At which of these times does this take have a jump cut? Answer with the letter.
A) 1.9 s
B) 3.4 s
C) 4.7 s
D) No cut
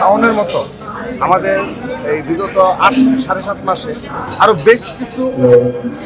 D